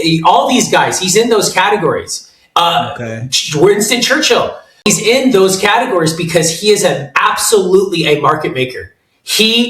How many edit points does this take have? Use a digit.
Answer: 1